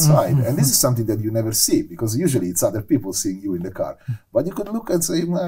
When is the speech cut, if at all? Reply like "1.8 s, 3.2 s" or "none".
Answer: none

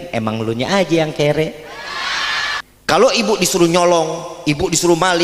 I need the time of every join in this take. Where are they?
2.6 s

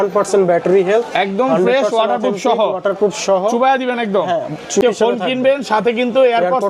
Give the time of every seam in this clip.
4.8 s

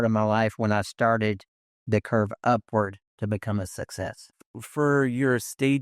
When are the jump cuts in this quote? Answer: 4.3 s

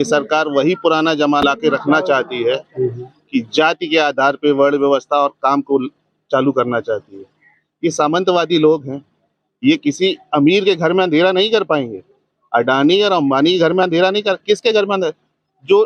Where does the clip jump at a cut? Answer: 1.4 s

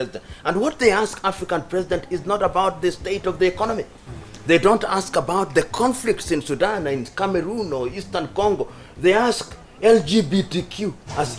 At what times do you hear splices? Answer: none

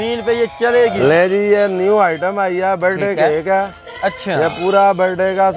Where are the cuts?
1.0 s

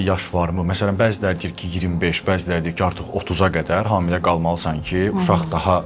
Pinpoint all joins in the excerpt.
none

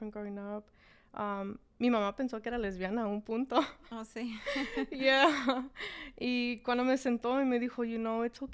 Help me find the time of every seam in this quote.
none

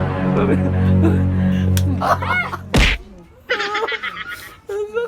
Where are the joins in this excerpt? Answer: none

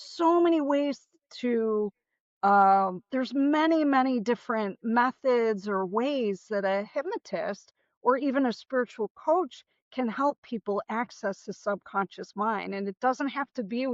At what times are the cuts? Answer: none

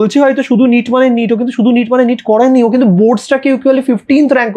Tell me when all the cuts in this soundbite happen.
none

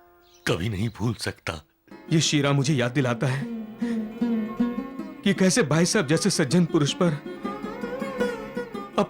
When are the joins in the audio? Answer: 1.9 s

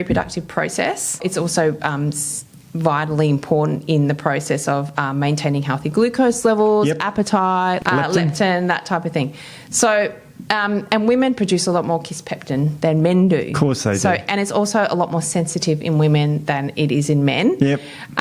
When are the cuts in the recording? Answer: 1.2 s, 7.8 s

